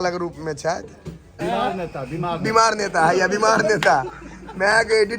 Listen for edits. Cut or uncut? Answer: cut